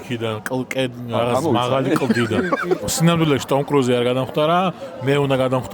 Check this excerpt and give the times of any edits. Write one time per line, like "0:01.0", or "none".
none